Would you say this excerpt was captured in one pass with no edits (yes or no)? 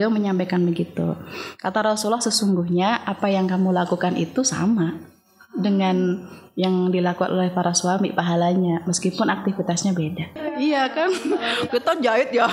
yes